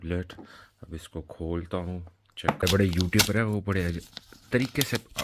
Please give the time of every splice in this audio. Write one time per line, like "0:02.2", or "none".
0:02.6